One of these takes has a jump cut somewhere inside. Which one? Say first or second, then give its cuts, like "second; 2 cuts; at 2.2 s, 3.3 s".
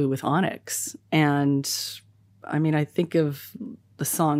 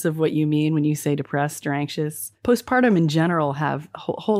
second; 1 cut; at 2.3 s